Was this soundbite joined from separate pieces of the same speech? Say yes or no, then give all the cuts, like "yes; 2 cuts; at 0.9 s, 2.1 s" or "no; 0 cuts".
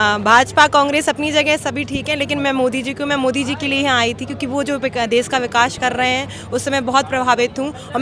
no; 0 cuts